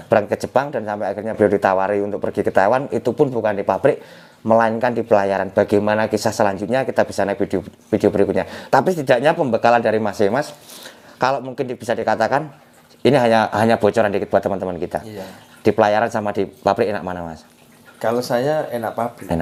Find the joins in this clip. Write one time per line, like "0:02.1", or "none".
none